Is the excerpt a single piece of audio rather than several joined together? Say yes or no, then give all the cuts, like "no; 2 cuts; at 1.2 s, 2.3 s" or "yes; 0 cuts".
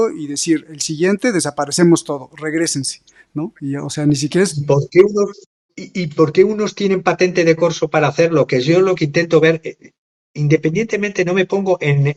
yes; 0 cuts